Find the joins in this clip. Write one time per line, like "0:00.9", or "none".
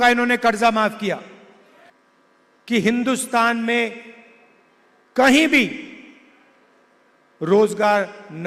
0:01.9